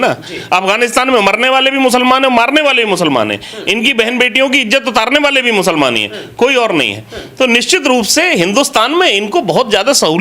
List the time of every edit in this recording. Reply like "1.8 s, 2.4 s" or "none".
none